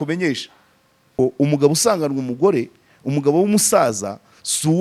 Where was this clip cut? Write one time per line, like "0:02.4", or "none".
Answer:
0:01.1

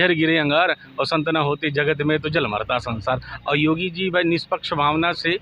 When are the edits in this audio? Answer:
none

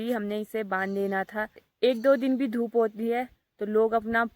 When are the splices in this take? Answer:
0:01.7

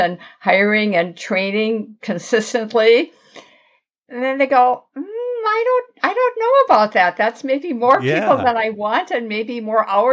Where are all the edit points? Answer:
none

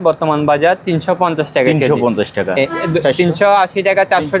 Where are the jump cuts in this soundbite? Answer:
0:02.7

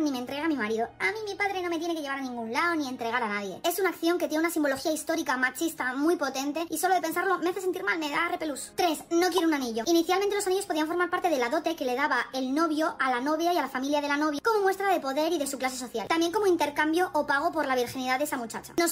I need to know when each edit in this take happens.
0:08.6

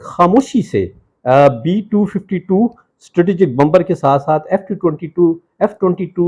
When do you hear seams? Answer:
none

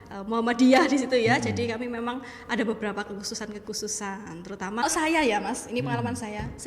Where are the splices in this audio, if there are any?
0:04.8

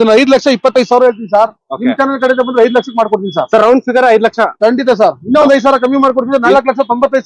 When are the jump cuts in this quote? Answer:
none

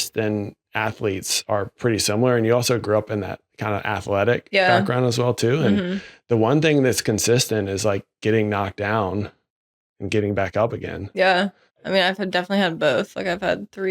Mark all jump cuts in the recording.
0:01.8

